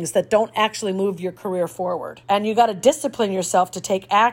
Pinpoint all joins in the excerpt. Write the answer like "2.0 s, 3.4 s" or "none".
2.1 s